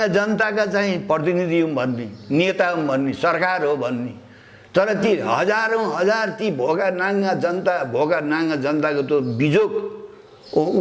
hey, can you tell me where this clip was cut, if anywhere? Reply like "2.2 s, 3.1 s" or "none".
none